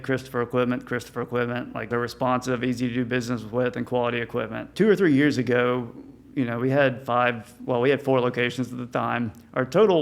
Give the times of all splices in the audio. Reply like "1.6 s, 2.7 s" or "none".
1.9 s, 4.7 s